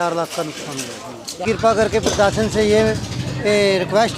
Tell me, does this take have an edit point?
yes; 1 cut; at 1.4 s

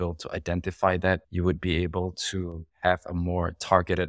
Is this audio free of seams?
yes; 0 cuts

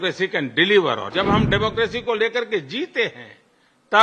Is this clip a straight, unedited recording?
no; 1 cut; at 1.1 s

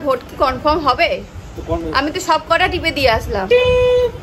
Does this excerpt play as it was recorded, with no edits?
yes; 0 cuts

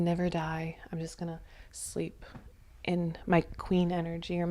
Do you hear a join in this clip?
no; 0 cuts

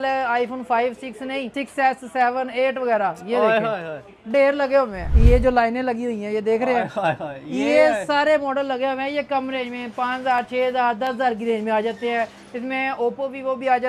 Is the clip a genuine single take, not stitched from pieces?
no; 2 cuts; at 1.5 s, 5.0 s

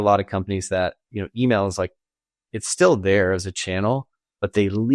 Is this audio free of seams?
yes; 0 cuts

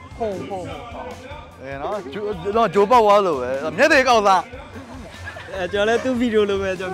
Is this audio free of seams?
yes; 0 cuts

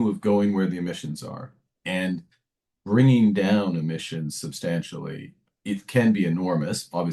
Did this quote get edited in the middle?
no; 0 cuts

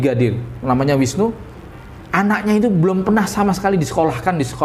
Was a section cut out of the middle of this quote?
no; 0 cuts

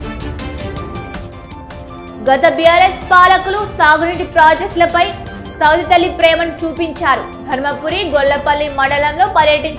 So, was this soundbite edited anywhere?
yes; 1 cut; at 2.1 s

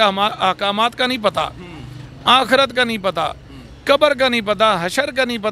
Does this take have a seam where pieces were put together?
no; 0 cuts

